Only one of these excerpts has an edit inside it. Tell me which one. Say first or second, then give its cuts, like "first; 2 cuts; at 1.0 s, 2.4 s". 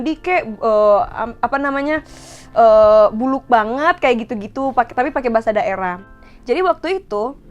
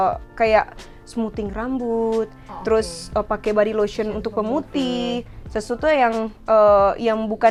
first; 1 cut; at 6.0 s